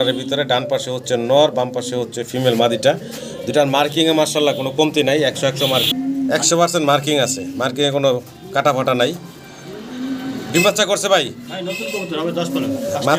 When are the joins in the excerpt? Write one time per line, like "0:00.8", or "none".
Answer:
none